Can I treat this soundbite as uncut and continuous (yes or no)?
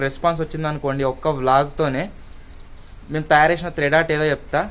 yes